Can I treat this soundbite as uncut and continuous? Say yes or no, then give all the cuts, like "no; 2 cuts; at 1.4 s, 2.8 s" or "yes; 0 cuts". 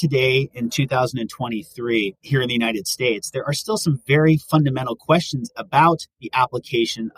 no; 1 cut; at 2.2 s